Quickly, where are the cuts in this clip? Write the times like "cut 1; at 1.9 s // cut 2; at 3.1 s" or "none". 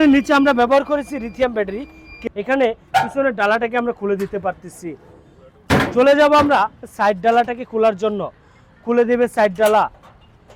cut 1; at 2.1 s

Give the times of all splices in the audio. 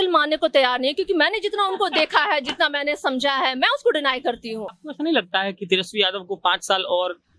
cut 1; at 4.8 s

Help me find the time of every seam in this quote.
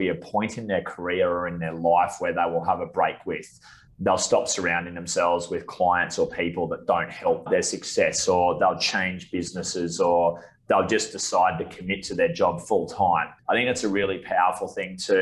cut 1; at 7.4 s // cut 2; at 13.3 s

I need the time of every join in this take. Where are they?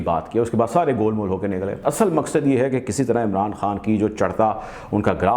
cut 1; at 1.7 s

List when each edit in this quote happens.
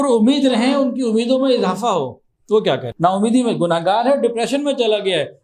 cut 1; at 2.9 s

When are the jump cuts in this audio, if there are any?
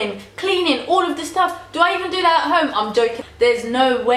cut 1; at 3.2 s

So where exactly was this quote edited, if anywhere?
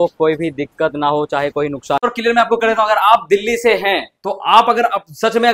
cut 1; at 2.0 s

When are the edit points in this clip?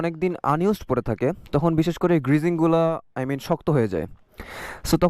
none

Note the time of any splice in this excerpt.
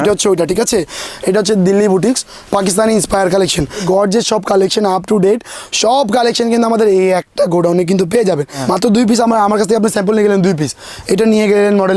cut 1; at 1.1 s // cut 2; at 3.8 s // cut 3; at 8.5 s

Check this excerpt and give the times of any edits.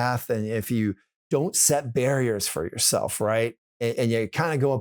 cut 1; at 1.1 s // cut 2; at 3.7 s

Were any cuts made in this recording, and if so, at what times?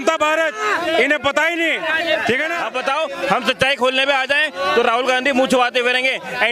cut 1; at 2.6 s

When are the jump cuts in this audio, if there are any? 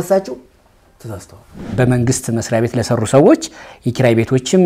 cut 1; at 1.7 s

